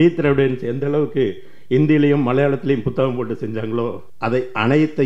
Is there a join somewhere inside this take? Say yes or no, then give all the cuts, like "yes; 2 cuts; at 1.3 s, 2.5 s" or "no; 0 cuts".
yes; 1 cut; at 4.1 s